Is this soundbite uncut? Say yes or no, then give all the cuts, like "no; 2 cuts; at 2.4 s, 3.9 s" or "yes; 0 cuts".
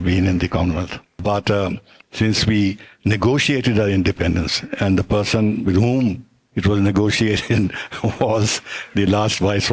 yes; 0 cuts